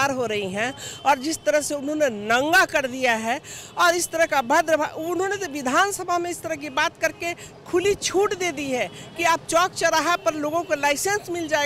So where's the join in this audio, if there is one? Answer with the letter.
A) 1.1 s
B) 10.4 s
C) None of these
C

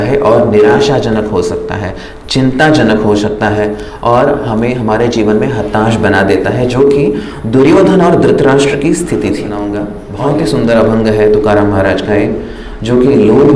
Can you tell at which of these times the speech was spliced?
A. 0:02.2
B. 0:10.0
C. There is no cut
B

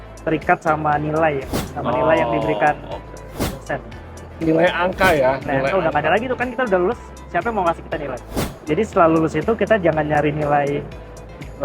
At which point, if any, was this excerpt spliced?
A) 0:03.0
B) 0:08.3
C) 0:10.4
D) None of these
B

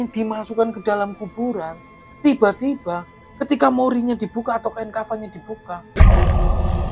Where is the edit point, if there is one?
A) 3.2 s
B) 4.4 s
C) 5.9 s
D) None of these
C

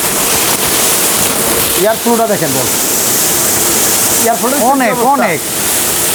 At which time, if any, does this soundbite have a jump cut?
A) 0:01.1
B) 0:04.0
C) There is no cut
C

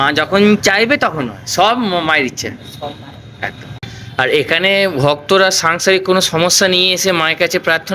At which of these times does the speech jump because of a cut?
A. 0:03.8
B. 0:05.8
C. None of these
A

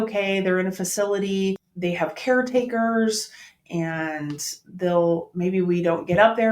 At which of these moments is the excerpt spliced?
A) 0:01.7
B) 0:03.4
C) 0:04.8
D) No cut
A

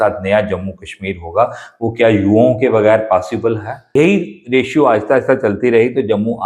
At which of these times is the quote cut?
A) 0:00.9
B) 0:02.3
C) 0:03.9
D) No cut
C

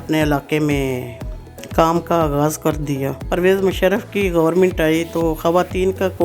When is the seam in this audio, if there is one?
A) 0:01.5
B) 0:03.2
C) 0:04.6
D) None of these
B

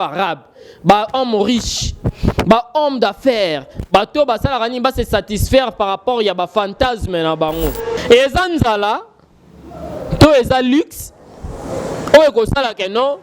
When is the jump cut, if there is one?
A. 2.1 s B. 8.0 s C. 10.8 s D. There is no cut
B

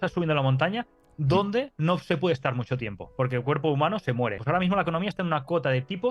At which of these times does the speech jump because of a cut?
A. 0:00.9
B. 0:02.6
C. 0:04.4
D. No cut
C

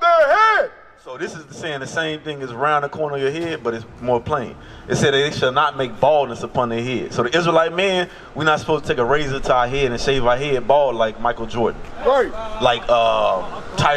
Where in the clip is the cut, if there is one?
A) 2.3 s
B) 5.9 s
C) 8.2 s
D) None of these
D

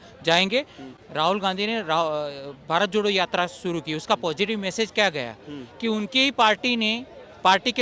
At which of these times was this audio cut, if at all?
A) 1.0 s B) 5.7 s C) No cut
C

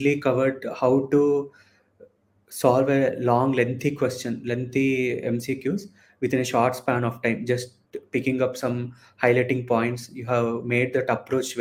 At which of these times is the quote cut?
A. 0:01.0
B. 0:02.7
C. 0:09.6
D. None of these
D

